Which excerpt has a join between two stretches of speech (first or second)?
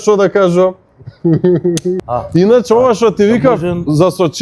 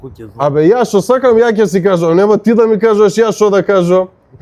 first